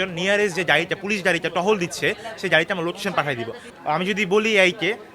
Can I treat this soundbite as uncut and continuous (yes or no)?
no